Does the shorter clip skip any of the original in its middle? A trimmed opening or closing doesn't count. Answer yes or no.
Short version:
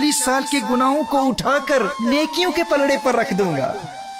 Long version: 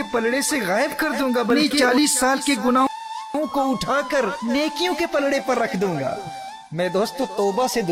yes